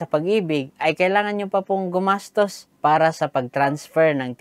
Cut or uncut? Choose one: uncut